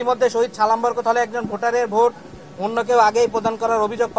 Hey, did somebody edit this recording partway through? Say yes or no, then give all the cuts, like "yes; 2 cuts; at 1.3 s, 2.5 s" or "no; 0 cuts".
no; 0 cuts